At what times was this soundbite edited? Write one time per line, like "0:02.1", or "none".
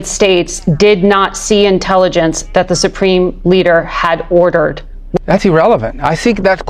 0:05.2